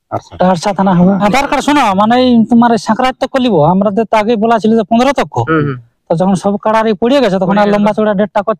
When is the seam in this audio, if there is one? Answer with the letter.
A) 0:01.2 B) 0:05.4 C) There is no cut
A